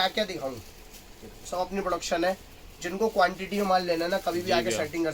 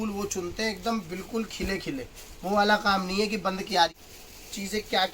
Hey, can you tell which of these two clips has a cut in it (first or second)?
second